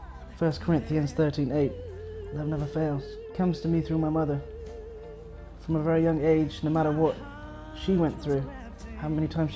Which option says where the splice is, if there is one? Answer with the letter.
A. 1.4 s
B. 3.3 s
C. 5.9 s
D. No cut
B